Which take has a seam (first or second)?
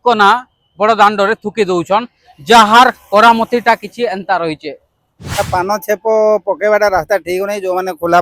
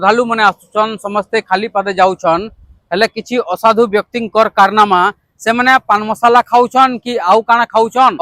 first